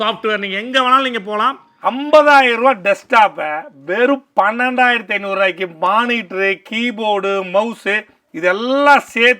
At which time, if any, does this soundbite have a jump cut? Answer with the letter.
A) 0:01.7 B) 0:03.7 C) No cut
A